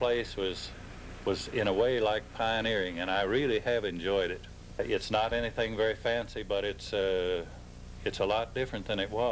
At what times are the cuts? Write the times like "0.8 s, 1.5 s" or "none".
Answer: 4.8 s